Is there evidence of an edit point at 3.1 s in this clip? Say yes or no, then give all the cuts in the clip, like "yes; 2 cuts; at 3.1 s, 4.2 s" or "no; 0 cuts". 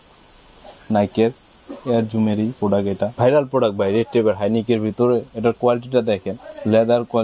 yes; 1 cut; at 3.1 s